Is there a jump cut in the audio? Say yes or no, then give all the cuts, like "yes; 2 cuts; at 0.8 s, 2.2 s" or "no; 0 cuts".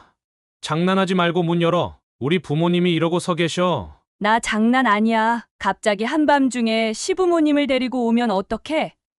no; 0 cuts